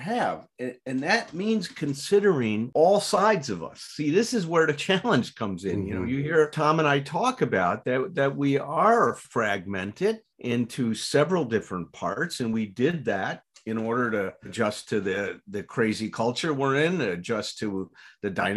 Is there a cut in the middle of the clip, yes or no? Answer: yes